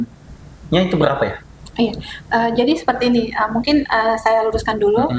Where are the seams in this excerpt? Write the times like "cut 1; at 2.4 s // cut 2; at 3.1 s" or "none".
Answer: none